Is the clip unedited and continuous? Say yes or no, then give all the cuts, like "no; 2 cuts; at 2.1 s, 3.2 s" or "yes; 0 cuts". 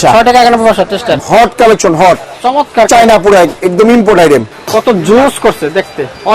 no; 2 cuts; at 1.1 s, 4.6 s